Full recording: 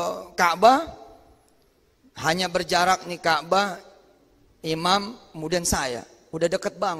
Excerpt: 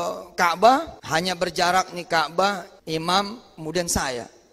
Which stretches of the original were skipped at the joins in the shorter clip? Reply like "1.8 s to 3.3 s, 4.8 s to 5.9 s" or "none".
1.0 s to 2.1 s, 3.9 s to 4.5 s